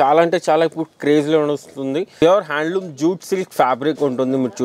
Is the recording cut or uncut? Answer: cut